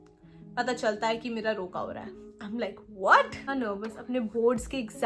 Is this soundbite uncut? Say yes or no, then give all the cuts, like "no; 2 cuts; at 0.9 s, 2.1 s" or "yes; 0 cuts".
no; 1 cut; at 3.5 s